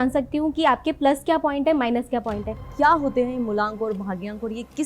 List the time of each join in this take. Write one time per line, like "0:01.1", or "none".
0:02.6